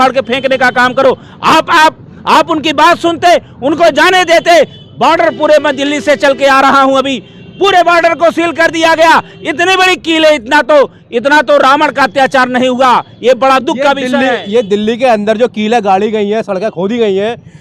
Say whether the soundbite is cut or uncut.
uncut